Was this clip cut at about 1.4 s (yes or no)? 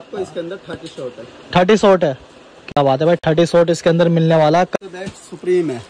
no